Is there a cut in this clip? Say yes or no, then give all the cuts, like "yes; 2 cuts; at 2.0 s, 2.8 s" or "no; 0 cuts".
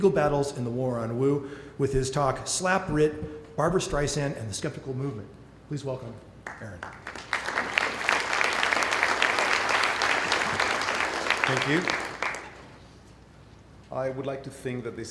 no; 0 cuts